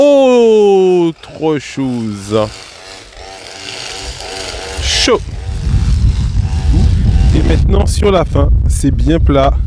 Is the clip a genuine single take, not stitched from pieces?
no; 1 cut; at 6.8 s

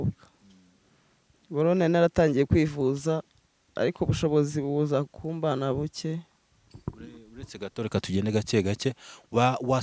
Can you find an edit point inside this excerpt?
no; 0 cuts

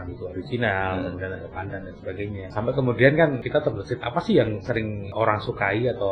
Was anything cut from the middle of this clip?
yes; 3 cuts; at 2.5 s, 3.4 s, 5.1 s

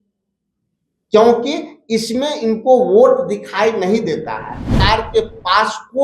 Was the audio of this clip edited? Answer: yes; 1 cut; at 4.8 s

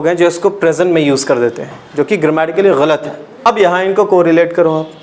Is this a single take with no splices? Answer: no; 1 cut; at 3.5 s

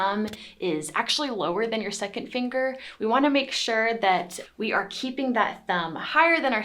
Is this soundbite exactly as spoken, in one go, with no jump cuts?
yes; 0 cuts

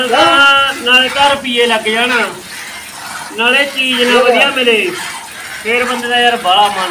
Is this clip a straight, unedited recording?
yes; 0 cuts

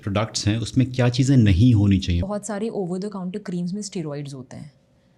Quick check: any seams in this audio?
yes; 1 cut; at 2.2 s

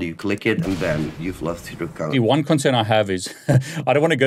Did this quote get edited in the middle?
yes; 1 cut; at 2.1 s

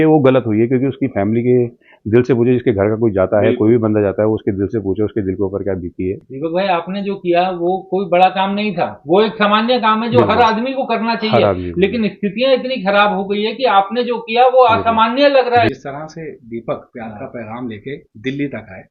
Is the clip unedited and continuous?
no; 2 cuts; at 6.3 s, 15.7 s

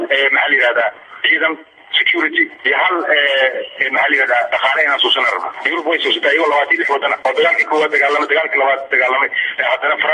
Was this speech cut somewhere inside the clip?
yes; 3 cuts; at 2.6 s, 5.6 s, 7.2 s

